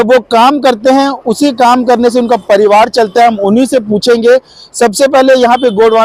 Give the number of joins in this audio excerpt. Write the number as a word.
zero